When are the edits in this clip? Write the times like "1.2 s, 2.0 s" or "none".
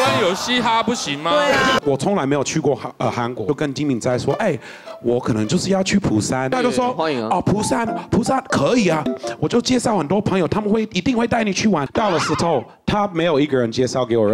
1.8 s, 3.4 s, 6.5 s, 9.1 s, 11.8 s